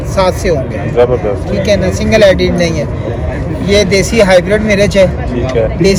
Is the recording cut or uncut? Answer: uncut